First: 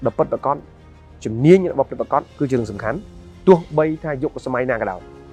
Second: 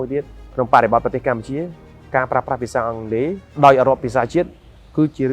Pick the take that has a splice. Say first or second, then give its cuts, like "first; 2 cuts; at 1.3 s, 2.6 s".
second; 1 cut; at 3.4 s